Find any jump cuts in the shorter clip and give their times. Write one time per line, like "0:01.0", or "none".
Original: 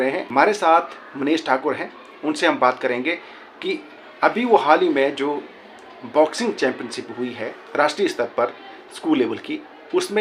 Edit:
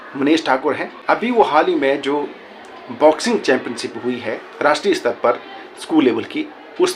0:00.9